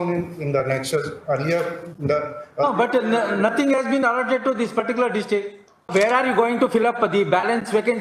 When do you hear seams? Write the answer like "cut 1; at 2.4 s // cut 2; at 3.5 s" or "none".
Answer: cut 1; at 5.9 s